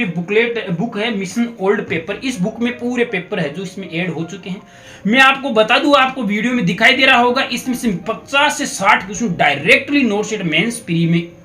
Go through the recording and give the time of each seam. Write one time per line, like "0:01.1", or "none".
0:04.8